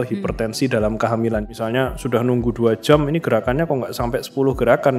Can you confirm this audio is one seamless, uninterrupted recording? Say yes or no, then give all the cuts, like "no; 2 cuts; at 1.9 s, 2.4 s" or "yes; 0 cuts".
no; 1 cut; at 1.5 s